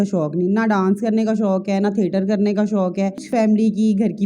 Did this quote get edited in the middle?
yes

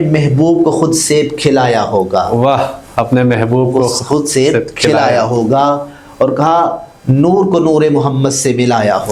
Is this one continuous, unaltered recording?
yes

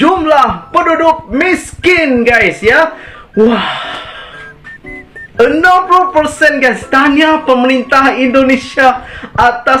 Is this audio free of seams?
yes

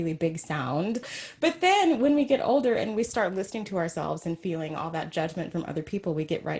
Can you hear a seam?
yes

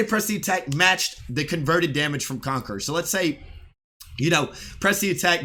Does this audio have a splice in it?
no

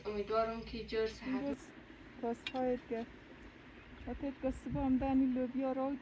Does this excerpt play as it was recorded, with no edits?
no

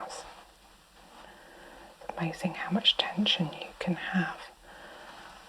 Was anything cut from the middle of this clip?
yes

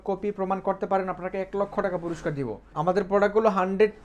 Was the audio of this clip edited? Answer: yes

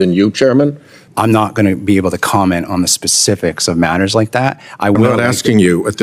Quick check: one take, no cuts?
no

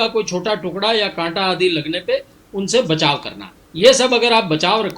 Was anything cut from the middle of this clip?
no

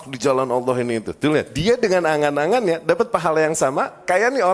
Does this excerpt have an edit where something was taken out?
yes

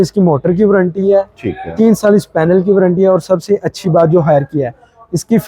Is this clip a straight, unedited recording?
yes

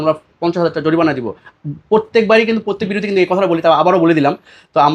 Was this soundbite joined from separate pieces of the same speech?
no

